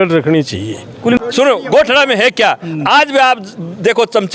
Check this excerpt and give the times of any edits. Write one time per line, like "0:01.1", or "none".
0:01.2